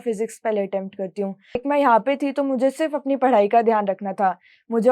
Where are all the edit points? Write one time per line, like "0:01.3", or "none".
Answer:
0:01.6

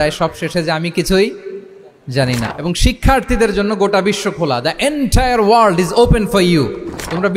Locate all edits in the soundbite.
0:02.5

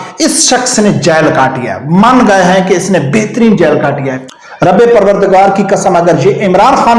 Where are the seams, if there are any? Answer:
0:04.3

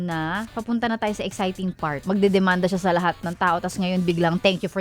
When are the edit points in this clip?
0:02.0

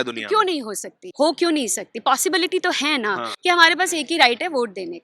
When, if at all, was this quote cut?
0:01.0
0:03.3

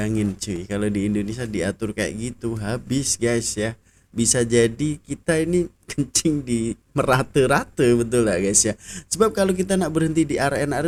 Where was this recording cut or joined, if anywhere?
none

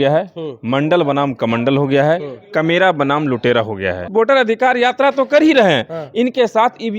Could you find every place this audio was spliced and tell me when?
0:04.1

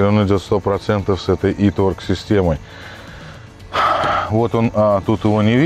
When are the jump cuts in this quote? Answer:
none

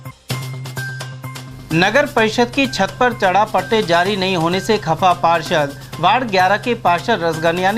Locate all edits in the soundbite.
0:01.3

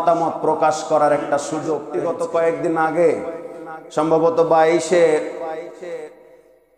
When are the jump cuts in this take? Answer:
0:02.0

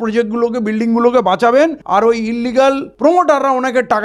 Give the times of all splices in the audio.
0:01.8
0:02.9

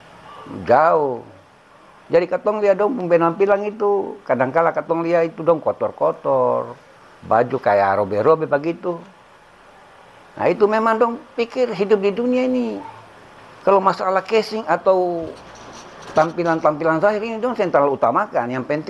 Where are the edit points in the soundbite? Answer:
none

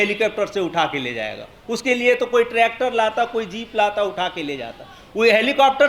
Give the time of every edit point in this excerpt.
none

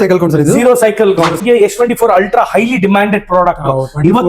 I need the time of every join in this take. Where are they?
0:01.4

